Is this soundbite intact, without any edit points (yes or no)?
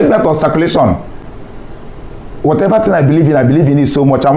yes